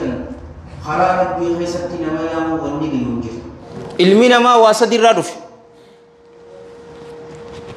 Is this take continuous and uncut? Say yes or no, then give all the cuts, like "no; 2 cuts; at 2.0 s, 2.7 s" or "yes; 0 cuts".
no; 1 cut; at 3.7 s